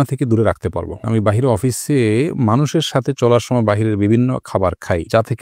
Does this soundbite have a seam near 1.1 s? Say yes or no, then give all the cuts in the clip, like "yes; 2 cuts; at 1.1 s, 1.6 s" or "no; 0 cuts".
yes; 1 cut; at 1.1 s